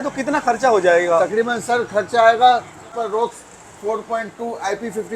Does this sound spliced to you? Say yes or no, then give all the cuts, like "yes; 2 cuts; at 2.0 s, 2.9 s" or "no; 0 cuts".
yes; 1 cut; at 3.0 s